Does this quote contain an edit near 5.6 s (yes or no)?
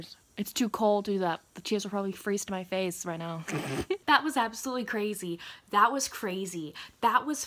no